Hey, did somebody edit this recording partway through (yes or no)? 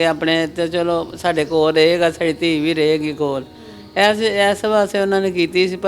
no